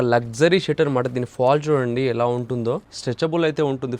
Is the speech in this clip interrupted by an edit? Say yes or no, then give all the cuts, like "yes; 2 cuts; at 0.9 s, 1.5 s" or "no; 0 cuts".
yes; 1 cut; at 2.9 s